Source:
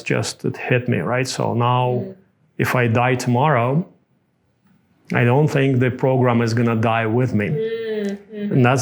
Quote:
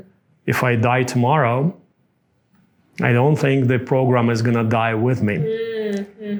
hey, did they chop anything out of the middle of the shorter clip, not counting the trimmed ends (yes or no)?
no